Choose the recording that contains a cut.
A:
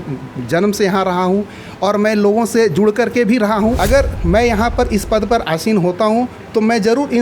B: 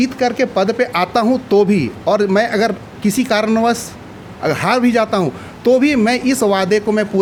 A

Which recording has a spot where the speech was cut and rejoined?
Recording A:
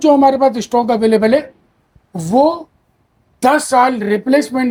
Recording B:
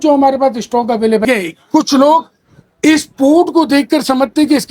B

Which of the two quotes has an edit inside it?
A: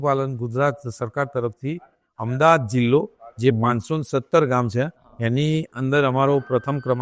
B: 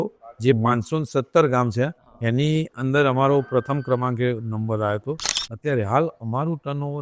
B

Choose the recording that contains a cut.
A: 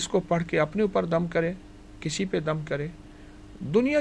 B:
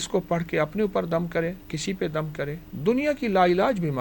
B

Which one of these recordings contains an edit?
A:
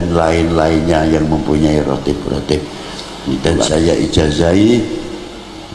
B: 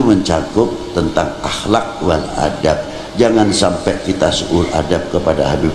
A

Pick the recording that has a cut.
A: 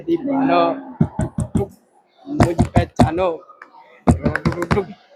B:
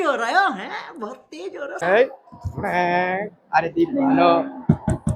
B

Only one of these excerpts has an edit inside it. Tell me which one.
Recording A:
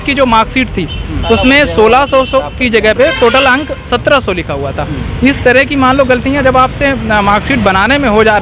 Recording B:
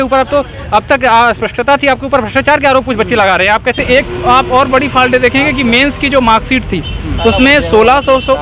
B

